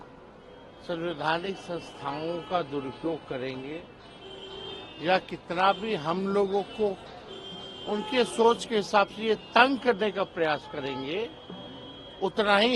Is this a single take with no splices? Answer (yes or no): yes